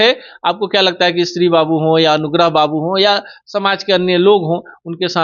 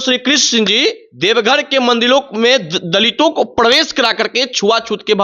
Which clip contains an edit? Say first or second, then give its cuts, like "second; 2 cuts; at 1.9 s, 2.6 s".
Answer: second; 1 cut; at 1.1 s